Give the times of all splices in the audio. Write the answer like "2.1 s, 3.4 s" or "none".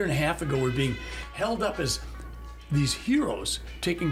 none